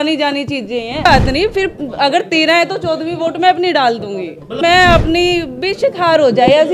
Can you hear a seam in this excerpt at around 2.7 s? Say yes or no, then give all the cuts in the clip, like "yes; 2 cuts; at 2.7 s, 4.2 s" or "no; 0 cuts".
no; 2 cuts; at 1.0 s, 4.6 s